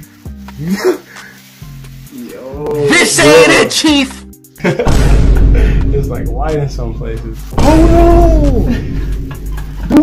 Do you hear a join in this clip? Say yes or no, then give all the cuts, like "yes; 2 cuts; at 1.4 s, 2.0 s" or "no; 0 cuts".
yes; 1 cut; at 4.5 s